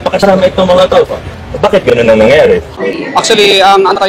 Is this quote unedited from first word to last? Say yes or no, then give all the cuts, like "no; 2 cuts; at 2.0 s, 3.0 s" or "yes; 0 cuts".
no; 1 cut; at 2.7 s